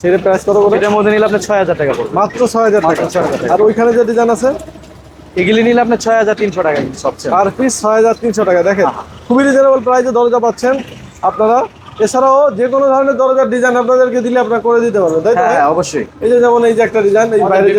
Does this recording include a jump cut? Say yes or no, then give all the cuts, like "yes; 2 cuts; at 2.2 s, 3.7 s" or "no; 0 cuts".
no; 0 cuts